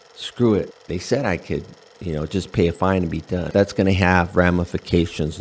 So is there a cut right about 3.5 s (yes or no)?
yes